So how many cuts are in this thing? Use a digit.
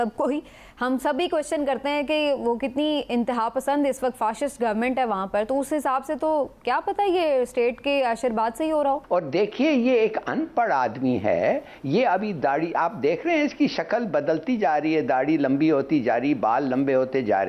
1